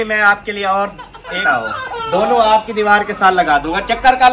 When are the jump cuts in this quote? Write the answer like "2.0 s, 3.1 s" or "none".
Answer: 1.4 s